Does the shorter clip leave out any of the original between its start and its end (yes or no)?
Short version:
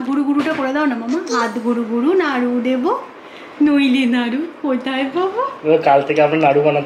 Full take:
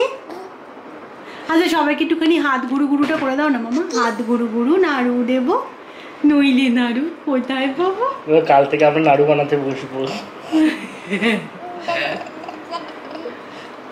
no